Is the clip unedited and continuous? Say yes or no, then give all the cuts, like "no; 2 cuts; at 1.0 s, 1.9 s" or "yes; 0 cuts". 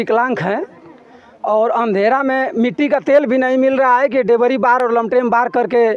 yes; 0 cuts